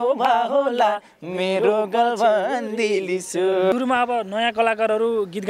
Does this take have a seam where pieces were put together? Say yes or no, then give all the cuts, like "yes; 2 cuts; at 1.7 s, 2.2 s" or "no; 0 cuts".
yes; 1 cut; at 3.7 s